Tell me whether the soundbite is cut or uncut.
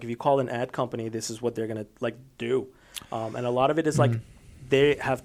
uncut